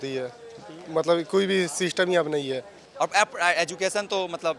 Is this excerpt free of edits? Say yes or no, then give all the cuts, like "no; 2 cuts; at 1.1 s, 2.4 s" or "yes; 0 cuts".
no; 1 cut; at 2.8 s